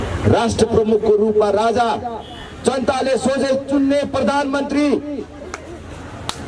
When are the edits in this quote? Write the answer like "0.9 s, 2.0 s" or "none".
none